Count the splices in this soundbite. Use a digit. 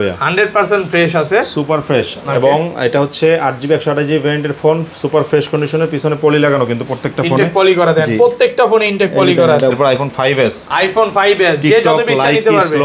1